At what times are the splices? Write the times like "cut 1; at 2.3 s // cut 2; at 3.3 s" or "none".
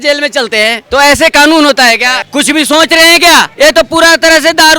cut 1; at 0.8 s // cut 2; at 2.2 s // cut 3; at 3.5 s